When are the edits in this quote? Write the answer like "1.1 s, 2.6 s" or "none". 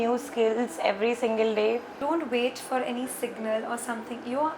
2.0 s